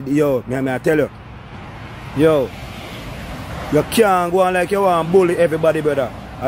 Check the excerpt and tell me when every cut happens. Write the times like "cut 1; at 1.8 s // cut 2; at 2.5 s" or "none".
none